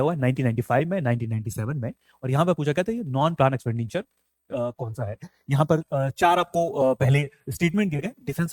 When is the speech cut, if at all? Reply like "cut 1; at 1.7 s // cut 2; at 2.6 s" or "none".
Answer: none